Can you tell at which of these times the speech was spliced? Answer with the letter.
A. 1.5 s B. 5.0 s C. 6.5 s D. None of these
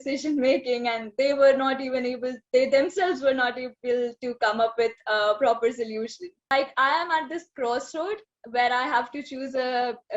C